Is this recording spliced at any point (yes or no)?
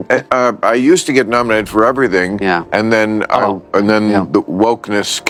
no